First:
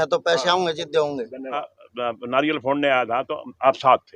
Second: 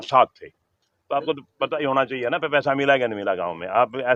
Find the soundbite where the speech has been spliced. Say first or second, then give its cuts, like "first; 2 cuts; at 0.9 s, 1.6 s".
first; 1 cut; at 1.7 s